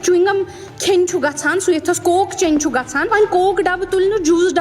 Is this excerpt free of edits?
no; 1 cut; at 3.1 s

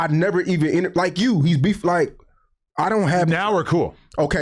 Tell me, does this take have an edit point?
no; 0 cuts

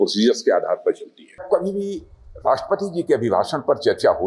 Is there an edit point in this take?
yes; 1 cut; at 1.4 s

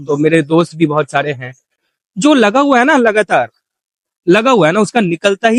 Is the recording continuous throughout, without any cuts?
yes; 0 cuts

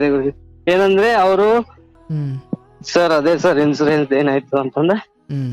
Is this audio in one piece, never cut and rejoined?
no; 1 cut; at 1.8 s

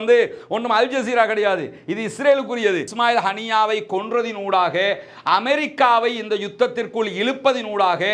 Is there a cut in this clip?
yes; 1 cut; at 2.9 s

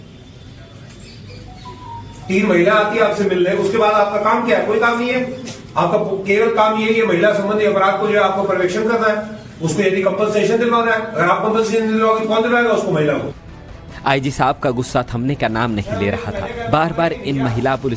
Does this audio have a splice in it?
no; 0 cuts

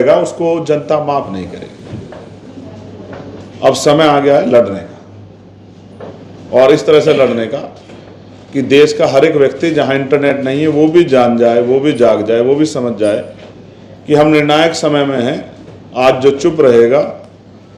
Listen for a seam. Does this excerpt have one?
no; 0 cuts

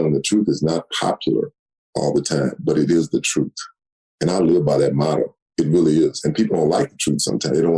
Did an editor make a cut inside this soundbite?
no; 0 cuts

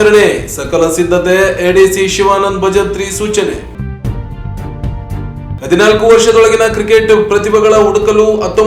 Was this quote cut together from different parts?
no; 0 cuts

